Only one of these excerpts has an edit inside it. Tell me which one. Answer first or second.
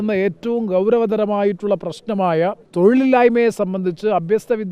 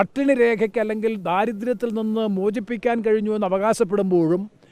first